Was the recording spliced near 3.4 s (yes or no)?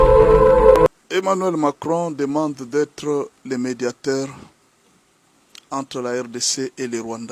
no